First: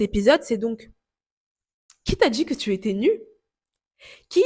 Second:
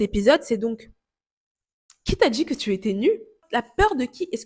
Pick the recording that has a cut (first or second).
second